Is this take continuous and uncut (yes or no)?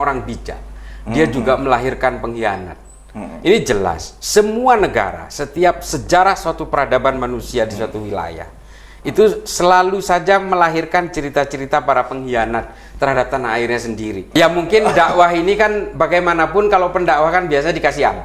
no